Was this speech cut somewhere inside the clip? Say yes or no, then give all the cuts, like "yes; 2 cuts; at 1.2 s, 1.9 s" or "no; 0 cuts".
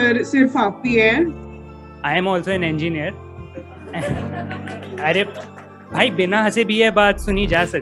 yes; 1 cut; at 1.5 s